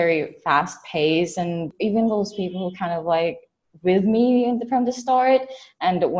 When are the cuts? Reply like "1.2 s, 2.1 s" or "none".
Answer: 1.7 s